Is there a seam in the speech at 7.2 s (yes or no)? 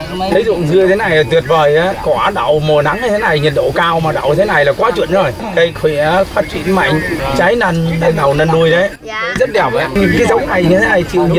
yes